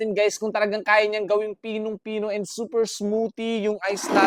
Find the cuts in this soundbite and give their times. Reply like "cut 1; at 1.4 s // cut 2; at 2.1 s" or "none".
none